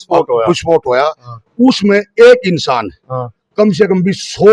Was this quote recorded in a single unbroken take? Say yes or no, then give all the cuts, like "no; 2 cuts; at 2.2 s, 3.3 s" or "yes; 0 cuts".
yes; 0 cuts